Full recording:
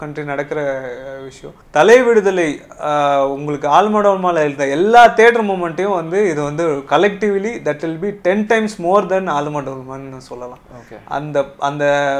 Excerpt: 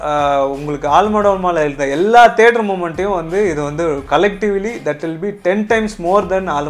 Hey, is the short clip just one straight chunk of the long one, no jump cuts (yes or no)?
yes